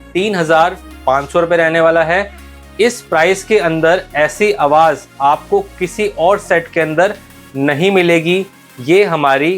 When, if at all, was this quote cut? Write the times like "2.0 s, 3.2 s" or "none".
none